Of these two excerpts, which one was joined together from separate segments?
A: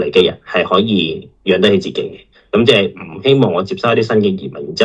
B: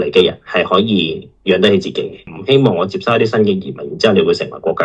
B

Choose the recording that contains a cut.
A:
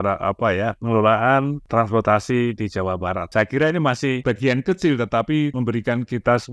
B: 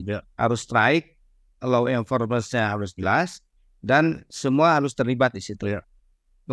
A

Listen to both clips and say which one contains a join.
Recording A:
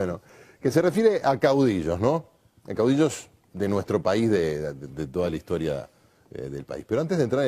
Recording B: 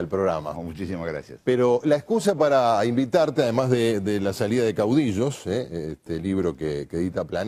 A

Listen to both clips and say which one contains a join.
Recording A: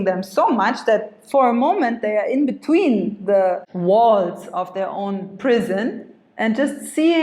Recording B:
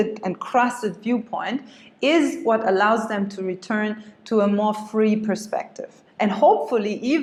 A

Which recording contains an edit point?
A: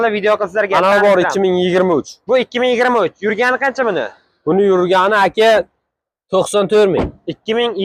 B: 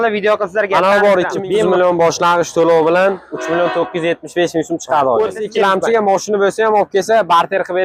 B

